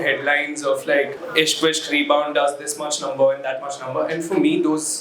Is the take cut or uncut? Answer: cut